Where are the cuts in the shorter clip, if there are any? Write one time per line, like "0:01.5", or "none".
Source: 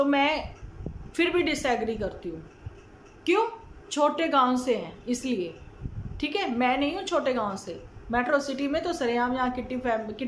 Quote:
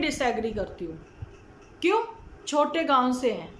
none